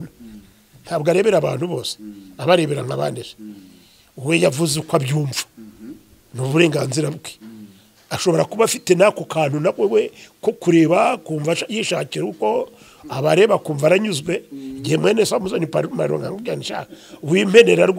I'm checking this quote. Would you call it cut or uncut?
uncut